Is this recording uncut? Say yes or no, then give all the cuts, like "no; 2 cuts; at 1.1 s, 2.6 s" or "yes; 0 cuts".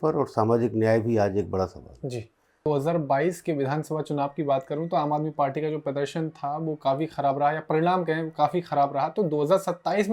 no; 1 cut; at 2.7 s